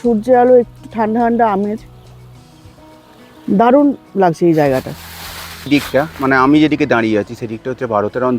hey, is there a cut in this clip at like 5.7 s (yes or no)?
yes